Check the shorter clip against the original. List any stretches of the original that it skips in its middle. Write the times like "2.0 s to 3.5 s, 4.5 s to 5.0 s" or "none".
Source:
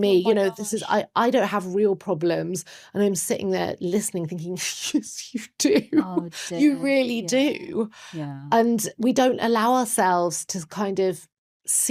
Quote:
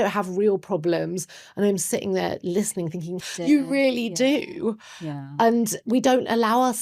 4.6 s to 6.4 s